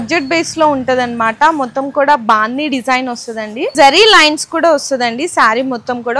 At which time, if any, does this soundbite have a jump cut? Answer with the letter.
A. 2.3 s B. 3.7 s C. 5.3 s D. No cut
B